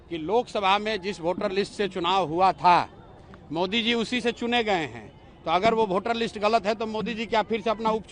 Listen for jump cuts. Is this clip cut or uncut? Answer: uncut